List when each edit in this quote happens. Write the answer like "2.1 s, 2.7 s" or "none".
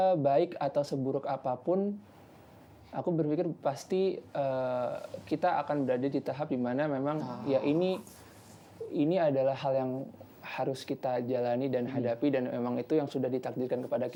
none